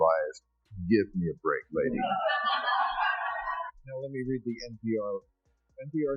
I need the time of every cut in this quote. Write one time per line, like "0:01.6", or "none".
0:03.7